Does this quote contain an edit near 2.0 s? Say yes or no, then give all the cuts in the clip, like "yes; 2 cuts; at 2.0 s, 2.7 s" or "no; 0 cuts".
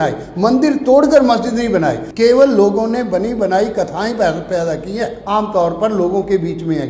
yes; 2 cuts; at 2.0 s, 5.2 s